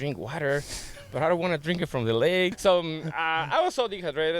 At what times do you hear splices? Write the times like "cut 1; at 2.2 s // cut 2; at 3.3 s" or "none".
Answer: cut 1; at 2.6 s